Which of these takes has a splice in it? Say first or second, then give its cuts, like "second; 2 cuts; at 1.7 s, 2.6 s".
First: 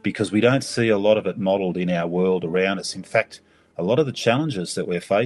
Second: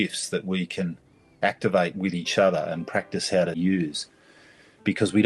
second; 1 cut; at 3.6 s